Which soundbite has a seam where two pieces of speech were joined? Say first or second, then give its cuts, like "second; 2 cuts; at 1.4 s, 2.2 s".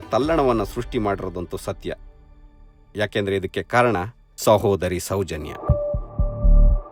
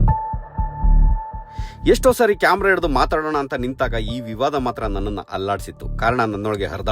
second; 1 cut; at 1.4 s